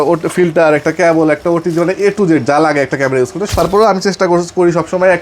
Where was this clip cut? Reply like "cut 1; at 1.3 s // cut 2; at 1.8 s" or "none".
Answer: cut 1; at 3.5 s